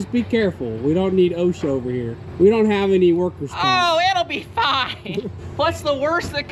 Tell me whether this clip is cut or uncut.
cut